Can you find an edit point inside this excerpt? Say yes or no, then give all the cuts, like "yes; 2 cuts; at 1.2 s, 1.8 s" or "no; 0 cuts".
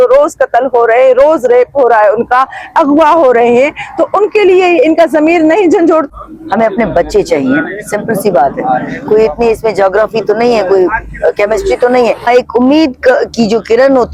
no; 0 cuts